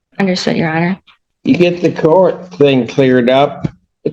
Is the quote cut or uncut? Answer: cut